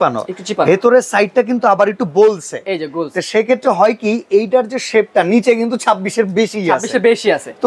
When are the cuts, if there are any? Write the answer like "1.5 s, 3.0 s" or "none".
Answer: none

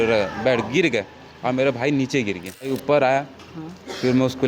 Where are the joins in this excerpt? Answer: 2.7 s

